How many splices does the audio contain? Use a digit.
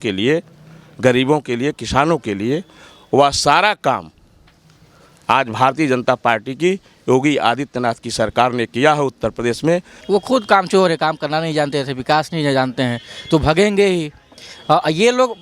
1